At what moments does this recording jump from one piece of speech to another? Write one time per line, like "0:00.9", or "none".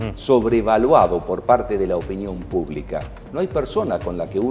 none